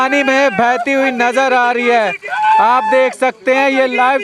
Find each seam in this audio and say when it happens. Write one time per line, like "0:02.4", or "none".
none